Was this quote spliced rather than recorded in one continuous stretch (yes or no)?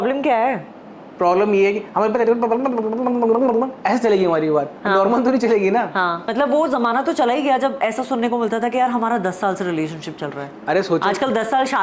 yes